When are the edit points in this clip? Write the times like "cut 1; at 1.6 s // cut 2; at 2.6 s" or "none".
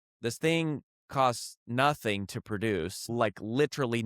cut 1; at 3.1 s